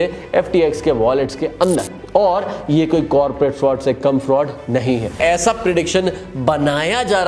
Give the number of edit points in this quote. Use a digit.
1